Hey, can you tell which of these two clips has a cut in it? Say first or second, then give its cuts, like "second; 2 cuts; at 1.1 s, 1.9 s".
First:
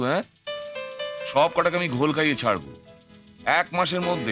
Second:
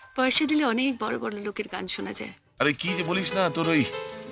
second; 1 cut; at 2.4 s